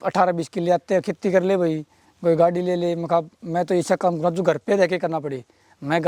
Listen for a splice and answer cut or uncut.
uncut